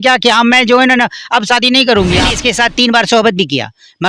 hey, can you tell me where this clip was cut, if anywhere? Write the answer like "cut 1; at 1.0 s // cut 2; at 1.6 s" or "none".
cut 1; at 2.3 s